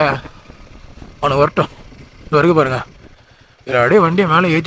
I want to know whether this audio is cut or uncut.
uncut